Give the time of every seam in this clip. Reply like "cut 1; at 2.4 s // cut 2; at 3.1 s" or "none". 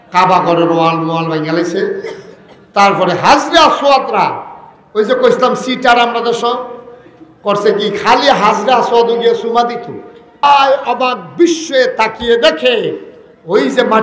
cut 1; at 10.4 s